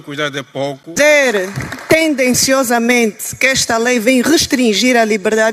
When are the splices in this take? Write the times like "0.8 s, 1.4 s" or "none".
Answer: 0.9 s